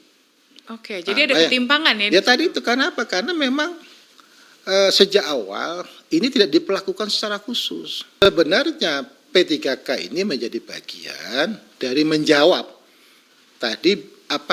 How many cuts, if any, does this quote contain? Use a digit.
1